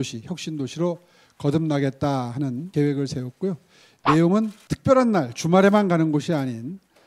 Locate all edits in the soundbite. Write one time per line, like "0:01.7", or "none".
0:02.6
0:04.6